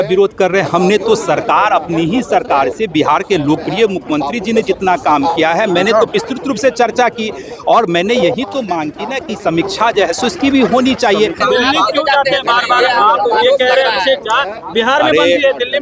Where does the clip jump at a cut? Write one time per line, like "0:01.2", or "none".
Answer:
0:11.4

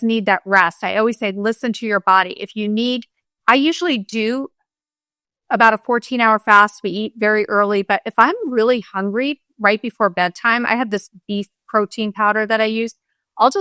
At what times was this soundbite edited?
none

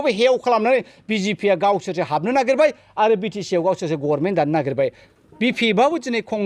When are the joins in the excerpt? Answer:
0:05.0

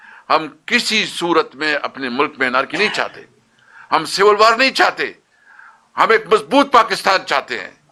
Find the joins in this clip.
none

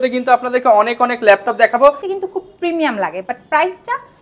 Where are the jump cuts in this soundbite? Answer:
0:02.1

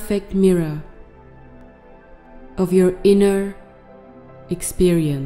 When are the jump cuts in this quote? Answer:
0:00.9
0:02.6

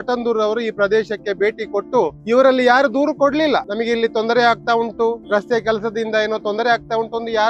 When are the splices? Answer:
0:02.2
0:03.7
0:05.2

